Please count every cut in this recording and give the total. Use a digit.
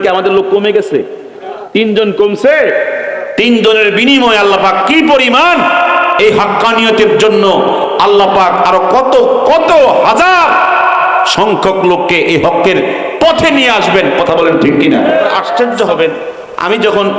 1